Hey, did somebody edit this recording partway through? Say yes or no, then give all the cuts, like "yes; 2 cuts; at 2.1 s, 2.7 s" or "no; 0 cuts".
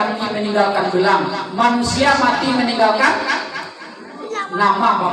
no; 0 cuts